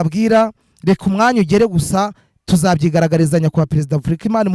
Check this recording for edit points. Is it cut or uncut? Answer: uncut